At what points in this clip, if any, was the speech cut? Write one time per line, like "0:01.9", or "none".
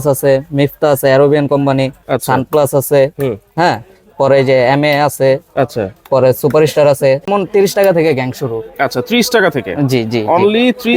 0:07.3